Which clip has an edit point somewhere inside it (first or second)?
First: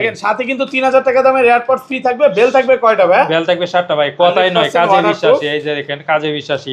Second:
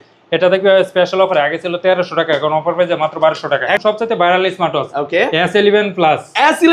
second